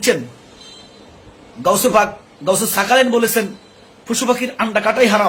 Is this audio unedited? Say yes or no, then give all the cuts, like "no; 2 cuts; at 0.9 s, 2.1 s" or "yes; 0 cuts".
yes; 0 cuts